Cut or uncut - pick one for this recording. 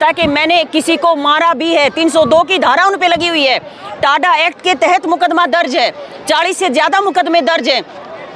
uncut